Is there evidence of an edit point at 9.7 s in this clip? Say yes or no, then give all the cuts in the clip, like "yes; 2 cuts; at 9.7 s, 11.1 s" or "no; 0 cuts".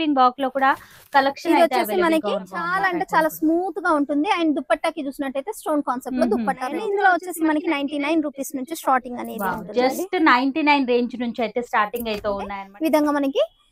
no; 3 cuts; at 2.7 s, 6.7 s, 12.6 s